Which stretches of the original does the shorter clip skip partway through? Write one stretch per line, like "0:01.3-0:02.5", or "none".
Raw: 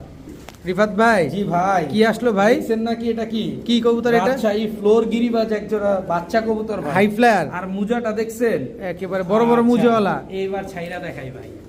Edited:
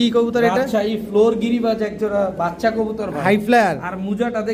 none